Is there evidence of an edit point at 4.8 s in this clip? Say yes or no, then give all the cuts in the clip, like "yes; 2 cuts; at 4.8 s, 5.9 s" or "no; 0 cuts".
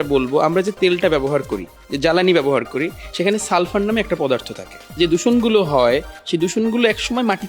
yes; 1 cut; at 4.8 s